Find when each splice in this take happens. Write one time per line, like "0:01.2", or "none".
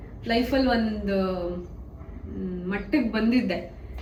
none

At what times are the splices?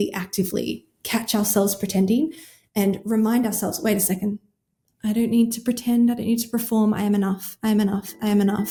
none

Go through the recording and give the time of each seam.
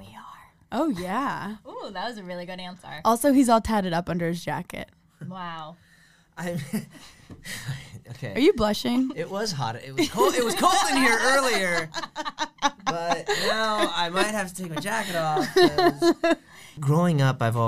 0:16.7

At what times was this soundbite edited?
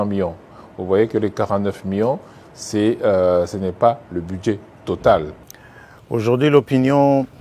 0:05.4

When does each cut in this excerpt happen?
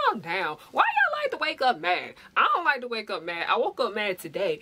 none

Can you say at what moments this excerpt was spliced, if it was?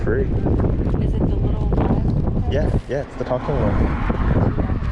none

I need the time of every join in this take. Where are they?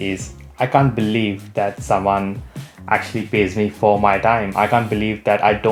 none

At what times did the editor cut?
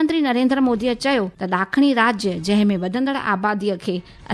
0:01.4

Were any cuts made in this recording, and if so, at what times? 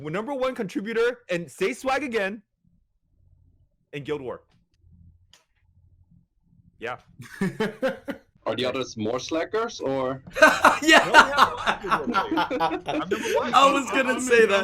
0:08.3
0:10.2

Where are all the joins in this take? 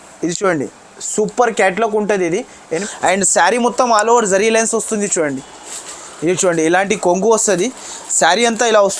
0:02.8

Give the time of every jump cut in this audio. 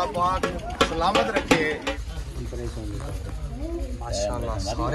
0:01.9

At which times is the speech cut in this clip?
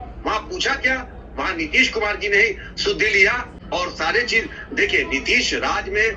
none

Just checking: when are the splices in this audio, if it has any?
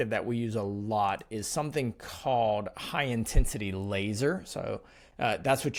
none

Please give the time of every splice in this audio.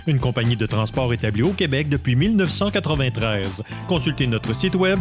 none

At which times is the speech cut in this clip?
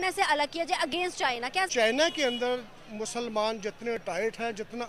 0:01.1

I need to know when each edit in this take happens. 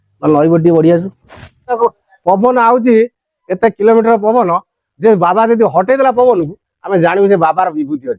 0:01.7

